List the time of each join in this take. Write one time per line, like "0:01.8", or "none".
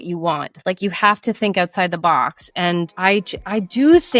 0:02.9